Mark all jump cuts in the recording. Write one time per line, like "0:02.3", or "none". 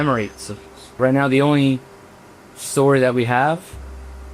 0:01.0